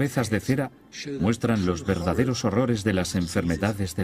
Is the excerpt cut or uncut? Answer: cut